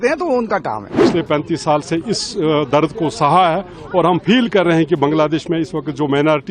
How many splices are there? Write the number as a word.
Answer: one